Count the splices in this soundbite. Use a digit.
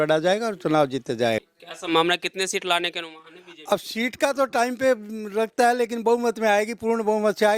1